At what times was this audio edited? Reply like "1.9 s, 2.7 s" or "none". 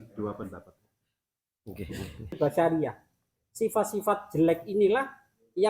2.4 s

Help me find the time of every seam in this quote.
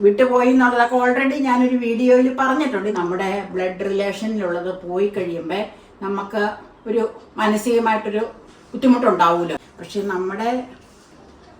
2.9 s, 9.7 s

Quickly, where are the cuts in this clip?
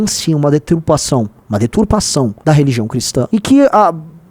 3.3 s

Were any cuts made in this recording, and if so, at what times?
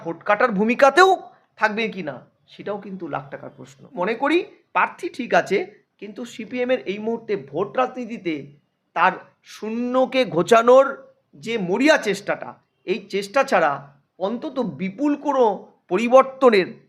4.0 s

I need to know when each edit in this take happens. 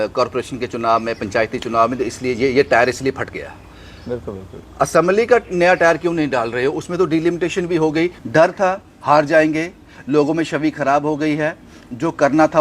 8.2 s

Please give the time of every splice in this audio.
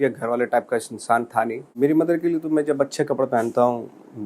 1.6 s

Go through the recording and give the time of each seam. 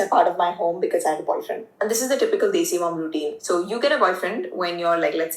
3.0 s

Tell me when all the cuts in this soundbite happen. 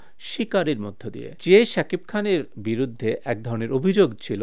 none

